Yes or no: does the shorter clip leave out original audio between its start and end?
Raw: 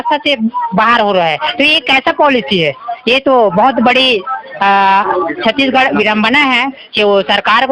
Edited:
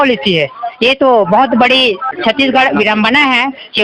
yes